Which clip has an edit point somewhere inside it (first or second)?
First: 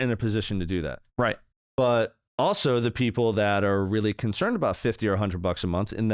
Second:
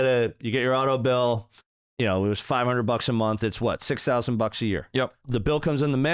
second